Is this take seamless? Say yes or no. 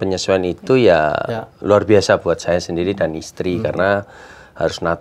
yes